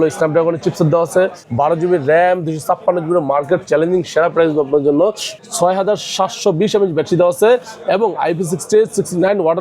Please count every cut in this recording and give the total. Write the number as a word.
two